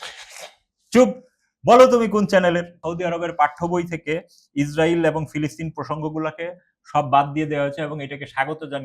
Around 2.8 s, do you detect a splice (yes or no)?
yes